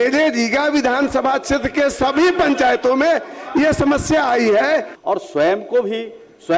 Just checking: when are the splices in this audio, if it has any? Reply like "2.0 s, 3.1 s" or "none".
4.9 s